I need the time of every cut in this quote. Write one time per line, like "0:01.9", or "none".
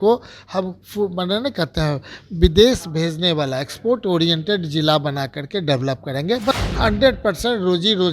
0:06.5